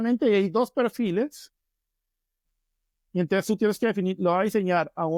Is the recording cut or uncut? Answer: uncut